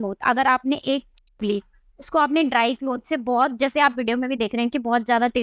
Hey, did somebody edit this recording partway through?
no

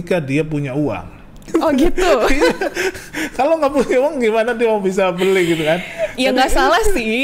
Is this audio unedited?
yes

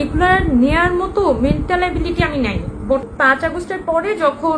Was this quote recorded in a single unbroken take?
no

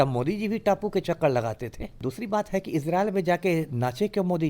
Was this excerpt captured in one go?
no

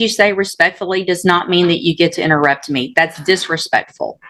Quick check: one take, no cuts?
yes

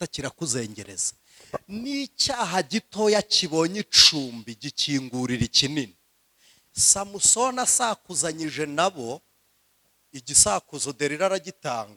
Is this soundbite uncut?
yes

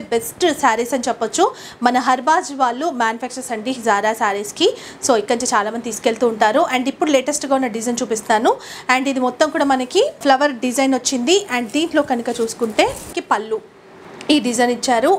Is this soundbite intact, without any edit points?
yes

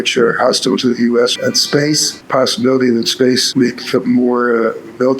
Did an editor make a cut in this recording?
yes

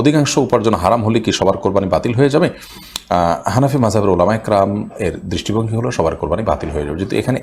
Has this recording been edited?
no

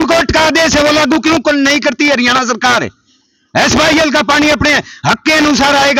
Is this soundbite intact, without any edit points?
yes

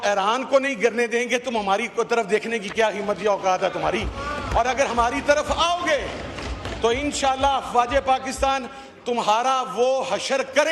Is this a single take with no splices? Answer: yes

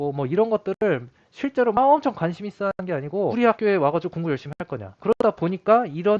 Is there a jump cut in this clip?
yes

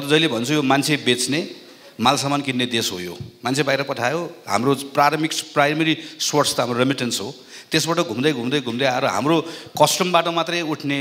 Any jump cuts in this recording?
no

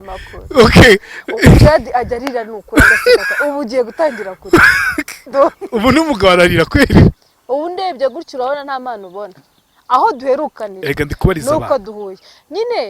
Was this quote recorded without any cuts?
no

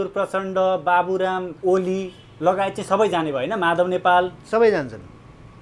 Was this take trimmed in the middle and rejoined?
yes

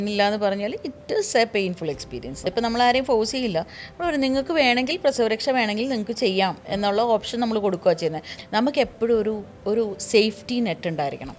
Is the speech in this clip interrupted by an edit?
yes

